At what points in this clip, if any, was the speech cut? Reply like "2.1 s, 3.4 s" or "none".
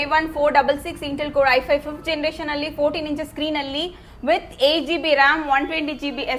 none